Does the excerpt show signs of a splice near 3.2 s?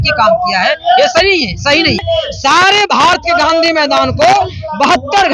no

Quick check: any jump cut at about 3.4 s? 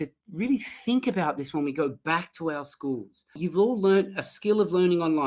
yes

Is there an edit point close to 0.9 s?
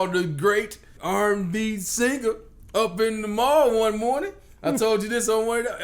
yes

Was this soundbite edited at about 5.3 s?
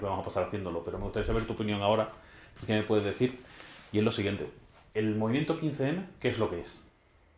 yes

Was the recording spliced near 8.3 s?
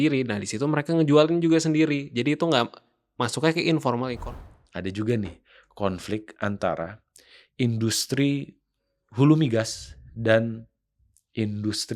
no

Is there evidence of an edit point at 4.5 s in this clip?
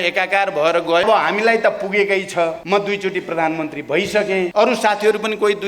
yes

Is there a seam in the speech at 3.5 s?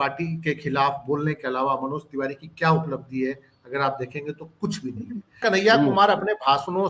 no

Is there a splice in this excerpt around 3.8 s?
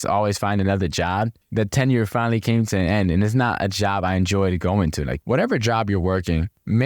no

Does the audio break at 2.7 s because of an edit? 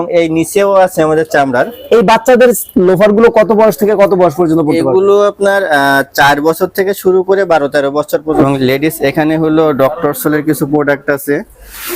no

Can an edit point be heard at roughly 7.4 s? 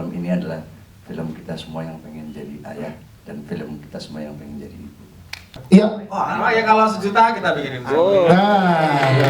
no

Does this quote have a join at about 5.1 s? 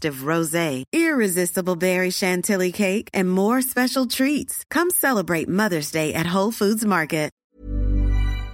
no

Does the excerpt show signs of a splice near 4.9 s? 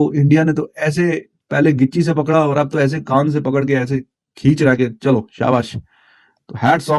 no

